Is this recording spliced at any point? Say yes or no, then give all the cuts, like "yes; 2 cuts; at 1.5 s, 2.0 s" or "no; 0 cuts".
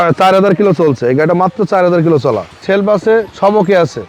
yes; 1 cut; at 2.6 s